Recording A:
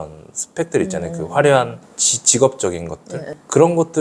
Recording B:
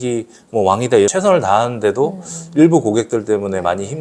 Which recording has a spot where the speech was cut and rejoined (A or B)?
B